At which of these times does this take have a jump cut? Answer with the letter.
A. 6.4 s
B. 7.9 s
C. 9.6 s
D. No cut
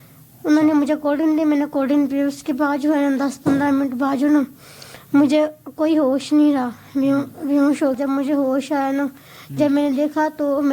B